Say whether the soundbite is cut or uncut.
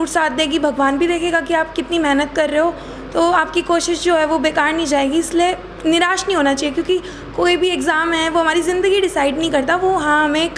uncut